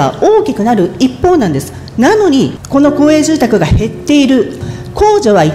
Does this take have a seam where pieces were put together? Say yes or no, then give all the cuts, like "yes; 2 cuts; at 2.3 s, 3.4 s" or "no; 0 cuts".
yes; 2 cuts; at 2.6 s, 4.6 s